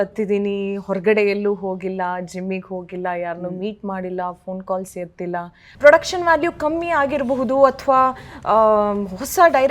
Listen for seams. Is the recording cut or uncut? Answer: cut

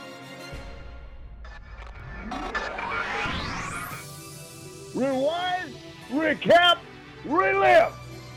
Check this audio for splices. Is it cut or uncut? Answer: uncut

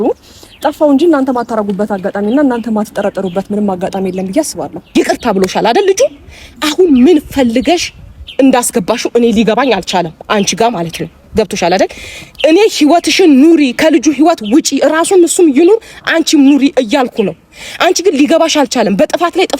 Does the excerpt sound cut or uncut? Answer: cut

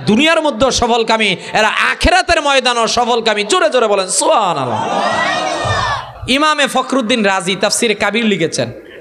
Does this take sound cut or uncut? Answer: cut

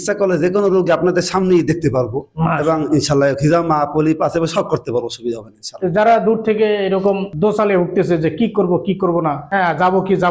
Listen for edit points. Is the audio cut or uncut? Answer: uncut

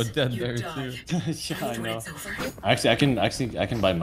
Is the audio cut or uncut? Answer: cut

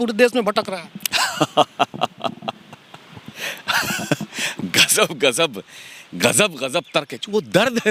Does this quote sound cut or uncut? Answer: uncut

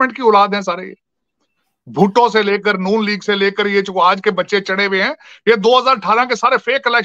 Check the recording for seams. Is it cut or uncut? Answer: uncut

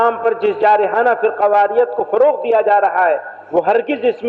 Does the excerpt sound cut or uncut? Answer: uncut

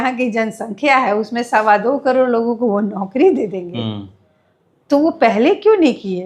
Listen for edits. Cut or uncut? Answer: uncut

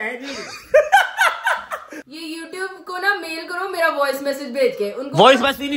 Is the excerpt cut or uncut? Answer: cut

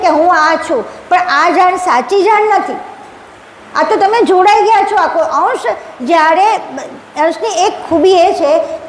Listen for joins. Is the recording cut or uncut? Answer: uncut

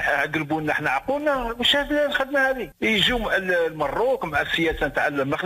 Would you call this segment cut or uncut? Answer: cut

